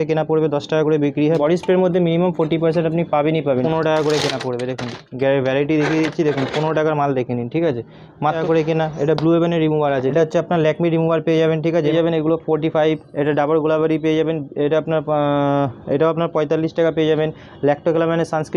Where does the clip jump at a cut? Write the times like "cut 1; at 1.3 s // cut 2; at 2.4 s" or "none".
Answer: cut 1; at 1.4 s // cut 2; at 3.6 s // cut 3; at 8.4 s // cut 4; at 10.1 s // cut 5; at 11.9 s